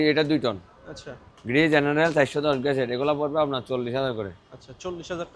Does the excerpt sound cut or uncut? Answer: uncut